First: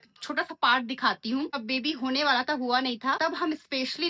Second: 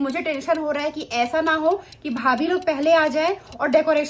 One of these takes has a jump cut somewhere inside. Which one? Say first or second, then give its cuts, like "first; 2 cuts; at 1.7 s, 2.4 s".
first; 2 cuts; at 1.6 s, 3.2 s